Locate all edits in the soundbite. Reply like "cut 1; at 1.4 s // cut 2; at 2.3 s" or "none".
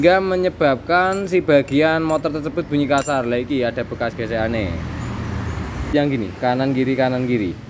cut 1; at 5.9 s